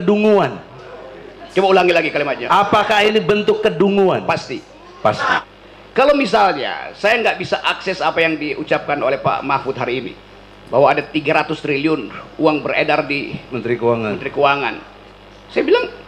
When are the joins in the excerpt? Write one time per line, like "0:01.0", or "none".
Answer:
0:05.4